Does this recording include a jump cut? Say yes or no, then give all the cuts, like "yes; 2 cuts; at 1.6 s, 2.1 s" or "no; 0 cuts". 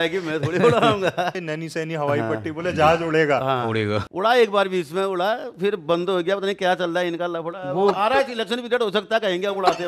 yes; 2 cuts; at 1.4 s, 4.0 s